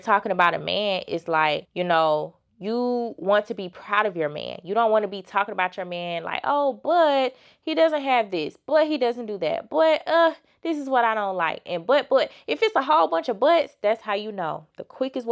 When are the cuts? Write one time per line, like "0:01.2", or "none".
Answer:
0:01.7